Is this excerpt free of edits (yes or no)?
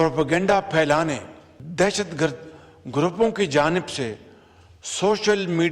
no